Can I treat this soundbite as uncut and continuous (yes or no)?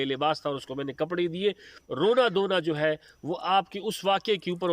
no